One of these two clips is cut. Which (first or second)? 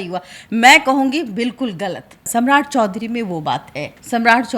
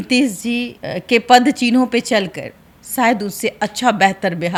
first